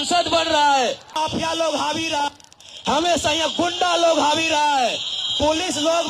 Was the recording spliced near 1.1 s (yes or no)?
yes